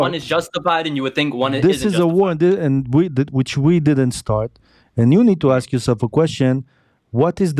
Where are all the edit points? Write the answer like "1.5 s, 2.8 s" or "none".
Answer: none